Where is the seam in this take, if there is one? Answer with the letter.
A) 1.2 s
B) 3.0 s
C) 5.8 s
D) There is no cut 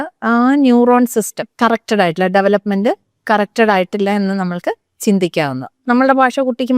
C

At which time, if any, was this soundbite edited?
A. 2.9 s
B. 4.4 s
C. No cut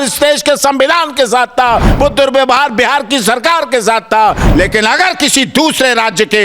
B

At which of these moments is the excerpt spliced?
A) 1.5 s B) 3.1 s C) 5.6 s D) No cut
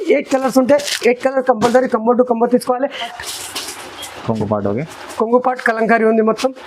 B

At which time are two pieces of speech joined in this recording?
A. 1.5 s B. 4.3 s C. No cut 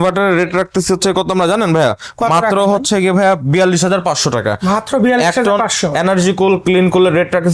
C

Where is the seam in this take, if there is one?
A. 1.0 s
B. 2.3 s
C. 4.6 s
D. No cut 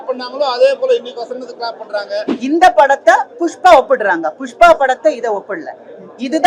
B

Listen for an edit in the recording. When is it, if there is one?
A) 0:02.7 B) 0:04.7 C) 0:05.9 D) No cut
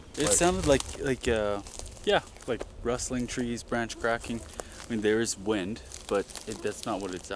D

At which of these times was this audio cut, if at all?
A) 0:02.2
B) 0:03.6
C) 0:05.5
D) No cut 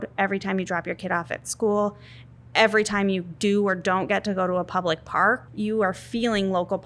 C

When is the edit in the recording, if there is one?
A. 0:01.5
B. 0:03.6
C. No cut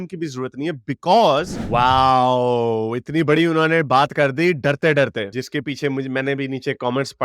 A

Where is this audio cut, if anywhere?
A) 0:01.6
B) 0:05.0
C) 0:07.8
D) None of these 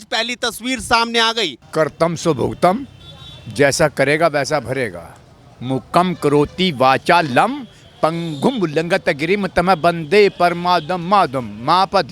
A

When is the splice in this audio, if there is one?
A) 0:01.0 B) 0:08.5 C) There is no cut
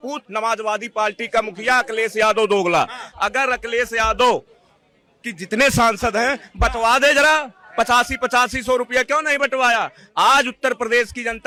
C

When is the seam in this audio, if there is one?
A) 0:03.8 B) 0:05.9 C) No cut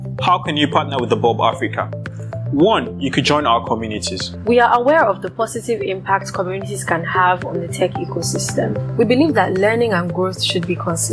A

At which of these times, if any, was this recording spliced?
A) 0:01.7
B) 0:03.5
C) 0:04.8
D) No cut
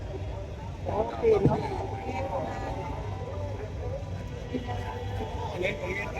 D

